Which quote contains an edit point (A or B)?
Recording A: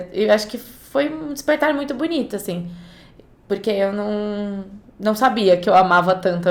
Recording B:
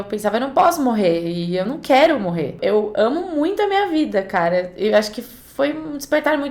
B